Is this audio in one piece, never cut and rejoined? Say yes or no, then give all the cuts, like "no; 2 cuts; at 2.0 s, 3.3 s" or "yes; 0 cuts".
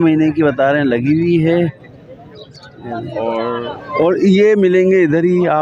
no; 1 cut; at 3.7 s